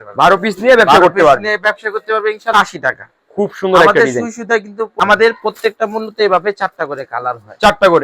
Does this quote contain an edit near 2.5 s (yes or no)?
yes